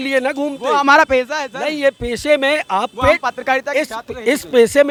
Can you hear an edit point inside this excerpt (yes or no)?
no